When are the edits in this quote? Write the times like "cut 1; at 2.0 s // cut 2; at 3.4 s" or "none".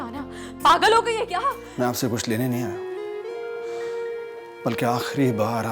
cut 1; at 1.6 s

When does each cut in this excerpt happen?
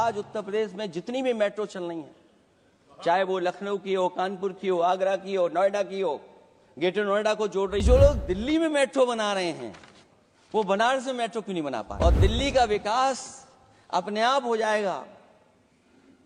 cut 1; at 7.8 s // cut 2; at 11.9 s

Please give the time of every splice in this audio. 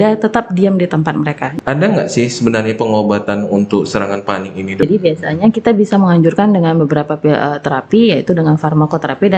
cut 1; at 1.5 s // cut 2; at 4.8 s

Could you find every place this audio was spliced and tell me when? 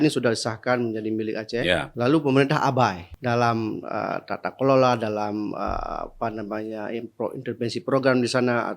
cut 1; at 1.9 s // cut 2; at 3.1 s

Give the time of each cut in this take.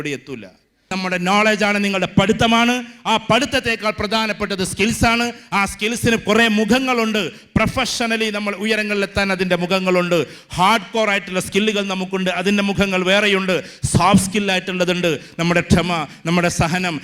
cut 1; at 0.9 s

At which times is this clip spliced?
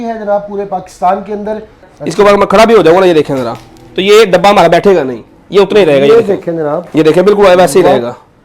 cut 1; at 1.9 s

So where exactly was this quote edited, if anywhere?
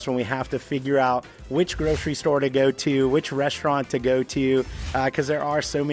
none

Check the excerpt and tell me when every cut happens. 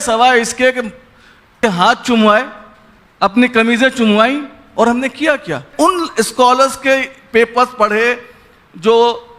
cut 1; at 1.5 s // cut 2; at 5.7 s

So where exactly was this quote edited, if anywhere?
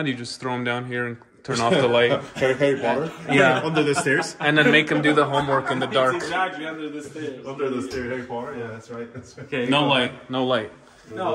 none

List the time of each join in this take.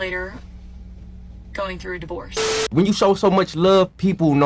cut 1; at 2.7 s

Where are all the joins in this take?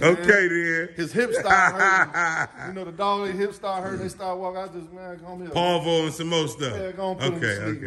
none

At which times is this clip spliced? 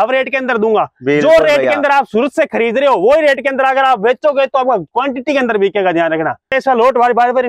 cut 1; at 6.5 s

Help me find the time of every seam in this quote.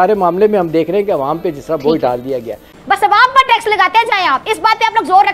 cut 1; at 2.6 s

